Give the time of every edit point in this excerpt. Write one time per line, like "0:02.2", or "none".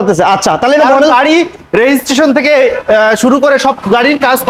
none